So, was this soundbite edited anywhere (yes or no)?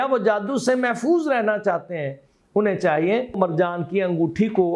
yes